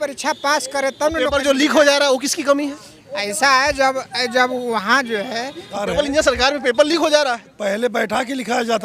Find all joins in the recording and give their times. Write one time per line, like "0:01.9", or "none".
0:05.8

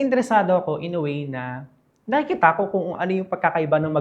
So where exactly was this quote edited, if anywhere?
none

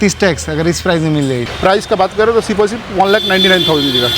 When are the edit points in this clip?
0:01.5

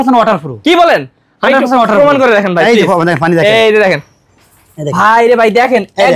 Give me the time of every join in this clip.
none

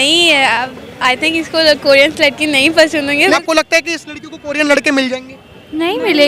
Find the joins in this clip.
0:03.4

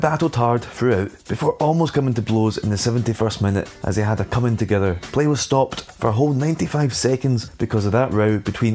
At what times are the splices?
0:01.2
0:03.7
0:05.0
0:05.8
0:07.5

